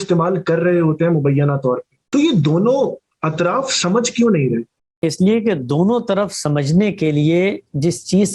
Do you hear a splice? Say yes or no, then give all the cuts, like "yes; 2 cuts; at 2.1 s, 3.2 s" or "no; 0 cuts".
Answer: yes; 2 cuts; at 1.9 s, 4.8 s